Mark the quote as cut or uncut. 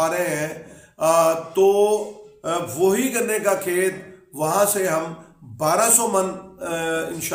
uncut